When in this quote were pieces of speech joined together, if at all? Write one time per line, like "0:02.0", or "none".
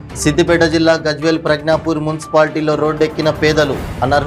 none